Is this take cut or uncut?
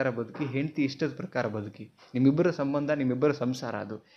uncut